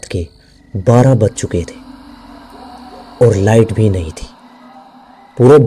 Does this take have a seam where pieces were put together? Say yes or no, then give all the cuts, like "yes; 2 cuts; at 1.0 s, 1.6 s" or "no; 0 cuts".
no; 0 cuts